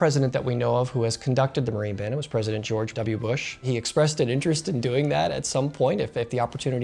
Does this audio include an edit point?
yes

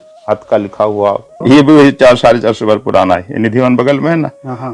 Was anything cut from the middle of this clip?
yes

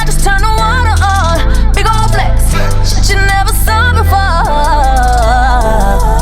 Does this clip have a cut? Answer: no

